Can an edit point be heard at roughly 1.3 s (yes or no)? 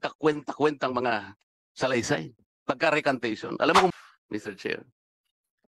no